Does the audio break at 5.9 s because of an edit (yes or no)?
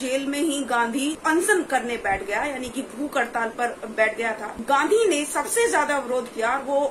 no